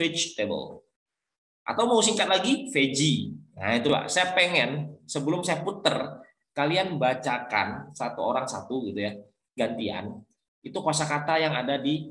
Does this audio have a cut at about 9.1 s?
no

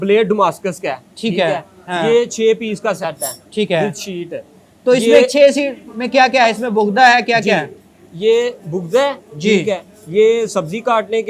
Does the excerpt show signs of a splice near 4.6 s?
no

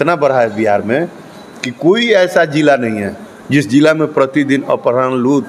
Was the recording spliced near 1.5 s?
no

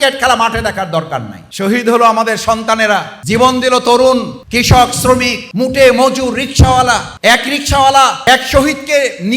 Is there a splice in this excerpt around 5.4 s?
yes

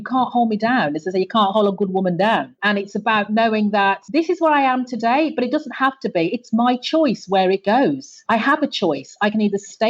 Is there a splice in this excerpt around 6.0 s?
no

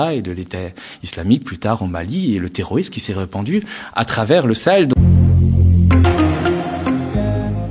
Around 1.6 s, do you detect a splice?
no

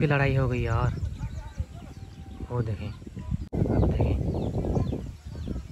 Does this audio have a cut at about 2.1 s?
no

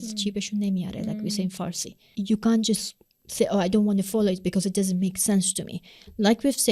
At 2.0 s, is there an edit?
yes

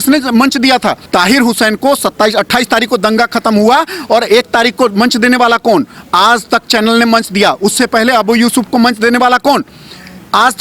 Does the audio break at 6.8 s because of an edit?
no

